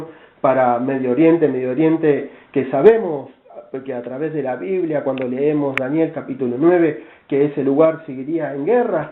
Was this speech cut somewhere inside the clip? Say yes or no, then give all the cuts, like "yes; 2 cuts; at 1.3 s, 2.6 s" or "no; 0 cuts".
no; 0 cuts